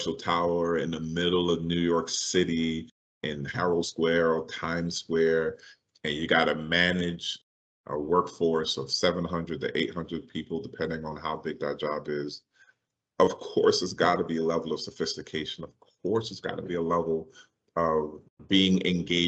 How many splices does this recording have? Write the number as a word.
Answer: one